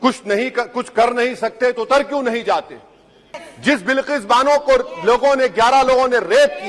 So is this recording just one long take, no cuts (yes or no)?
no